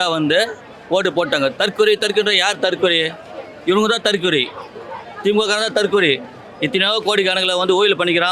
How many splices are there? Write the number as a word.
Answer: zero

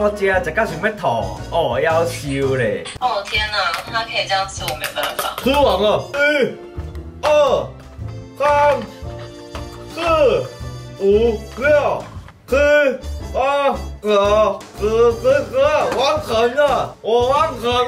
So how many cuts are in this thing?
two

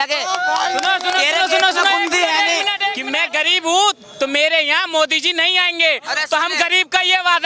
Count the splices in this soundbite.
one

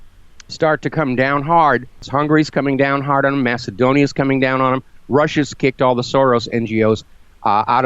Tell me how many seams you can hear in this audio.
one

